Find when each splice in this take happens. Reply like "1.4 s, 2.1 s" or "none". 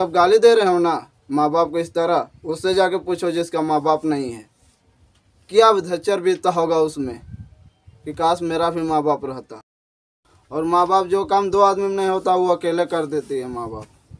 10.1 s